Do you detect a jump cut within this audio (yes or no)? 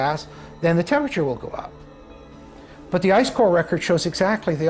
no